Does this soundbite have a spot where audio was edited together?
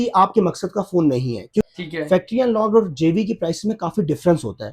yes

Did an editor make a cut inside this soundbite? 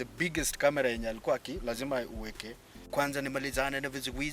yes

